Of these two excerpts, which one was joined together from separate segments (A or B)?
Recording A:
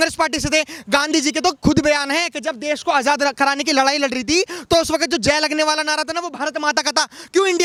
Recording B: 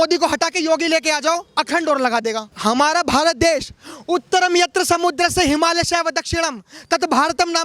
B